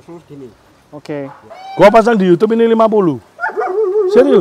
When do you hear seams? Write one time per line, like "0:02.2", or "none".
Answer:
0:01.7